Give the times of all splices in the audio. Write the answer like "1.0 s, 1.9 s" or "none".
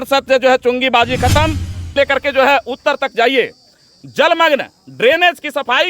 2.0 s